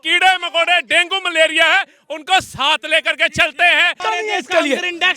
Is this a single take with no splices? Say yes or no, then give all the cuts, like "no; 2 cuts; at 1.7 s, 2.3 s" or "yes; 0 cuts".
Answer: no; 1 cut; at 4.0 s